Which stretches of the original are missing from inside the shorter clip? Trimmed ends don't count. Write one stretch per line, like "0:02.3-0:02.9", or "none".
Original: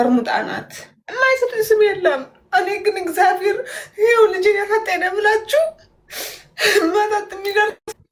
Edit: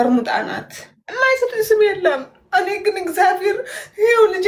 none